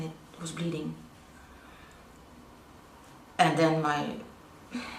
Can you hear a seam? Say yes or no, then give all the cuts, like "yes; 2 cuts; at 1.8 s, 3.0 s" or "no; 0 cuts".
no; 0 cuts